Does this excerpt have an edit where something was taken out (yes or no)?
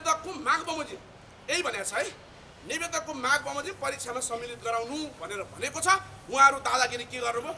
no